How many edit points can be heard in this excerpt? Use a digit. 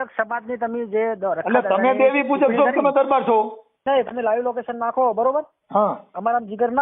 1